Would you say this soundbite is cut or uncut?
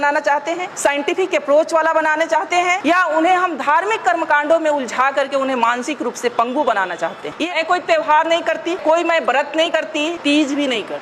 cut